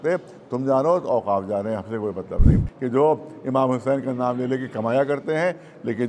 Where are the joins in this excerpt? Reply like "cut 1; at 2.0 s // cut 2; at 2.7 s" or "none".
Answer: cut 1; at 2.6 s